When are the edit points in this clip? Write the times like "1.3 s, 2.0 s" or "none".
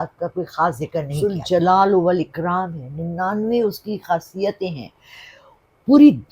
1.1 s